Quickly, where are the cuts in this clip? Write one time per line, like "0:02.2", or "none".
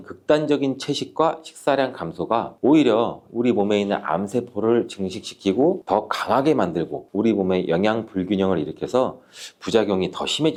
none